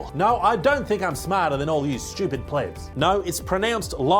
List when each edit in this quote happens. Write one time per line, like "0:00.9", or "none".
0:03.1